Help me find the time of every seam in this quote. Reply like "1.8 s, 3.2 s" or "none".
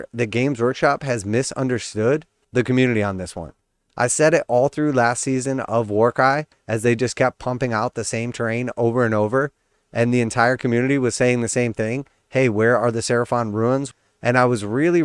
13.9 s